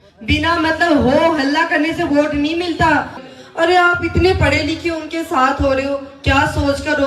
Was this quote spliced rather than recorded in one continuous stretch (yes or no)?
yes